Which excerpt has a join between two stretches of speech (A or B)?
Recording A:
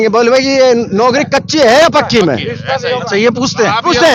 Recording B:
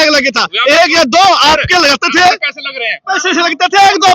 B